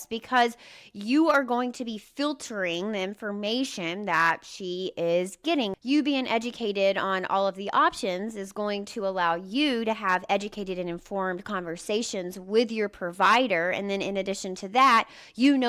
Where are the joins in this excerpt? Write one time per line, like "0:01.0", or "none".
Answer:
0:05.7